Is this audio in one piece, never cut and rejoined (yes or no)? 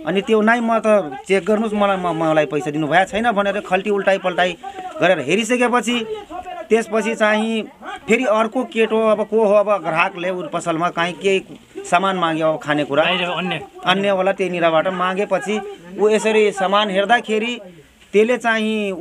yes